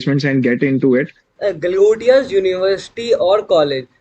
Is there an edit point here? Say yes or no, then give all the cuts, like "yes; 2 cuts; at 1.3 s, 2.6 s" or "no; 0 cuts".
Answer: yes; 1 cut; at 1.2 s